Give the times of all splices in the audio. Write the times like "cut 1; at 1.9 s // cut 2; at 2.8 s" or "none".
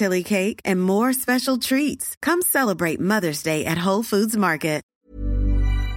cut 1; at 4.9 s